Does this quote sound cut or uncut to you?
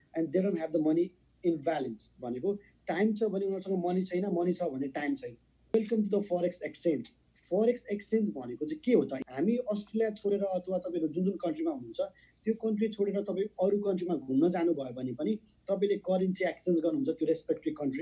cut